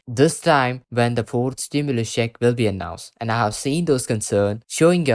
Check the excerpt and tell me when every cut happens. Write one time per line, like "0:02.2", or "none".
none